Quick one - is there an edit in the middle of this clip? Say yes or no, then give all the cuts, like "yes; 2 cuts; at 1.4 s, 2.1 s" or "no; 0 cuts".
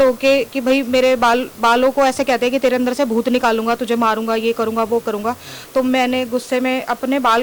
no; 0 cuts